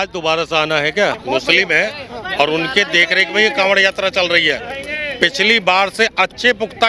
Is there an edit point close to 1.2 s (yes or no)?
yes